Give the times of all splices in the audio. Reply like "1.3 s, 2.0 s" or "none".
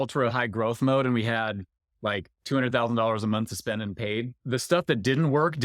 none